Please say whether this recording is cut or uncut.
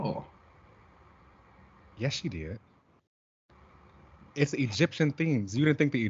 uncut